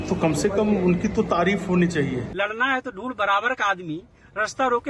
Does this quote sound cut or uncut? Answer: cut